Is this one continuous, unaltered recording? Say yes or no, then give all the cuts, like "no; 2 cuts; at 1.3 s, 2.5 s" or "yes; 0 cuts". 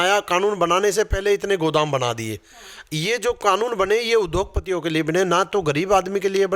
yes; 0 cuts